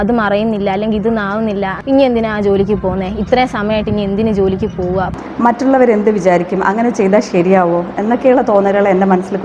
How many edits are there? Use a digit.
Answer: 2